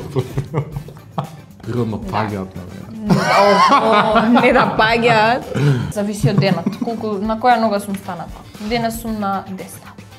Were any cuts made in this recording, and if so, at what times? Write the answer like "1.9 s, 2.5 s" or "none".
1.5 s, 5.9 s